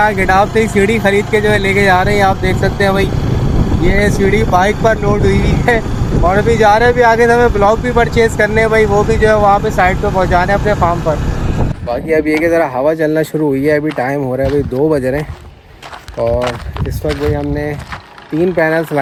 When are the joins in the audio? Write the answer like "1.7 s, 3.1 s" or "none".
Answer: none